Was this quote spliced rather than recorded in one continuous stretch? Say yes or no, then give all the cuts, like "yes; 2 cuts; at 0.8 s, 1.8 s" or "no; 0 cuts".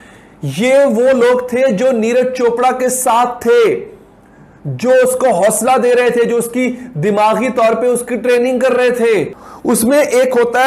yes; 1 cut; at 9.4 s